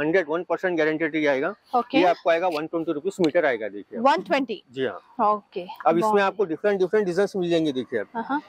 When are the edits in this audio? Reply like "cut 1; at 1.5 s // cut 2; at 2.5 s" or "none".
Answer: none